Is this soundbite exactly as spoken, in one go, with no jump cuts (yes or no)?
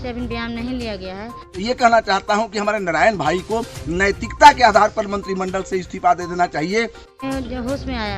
no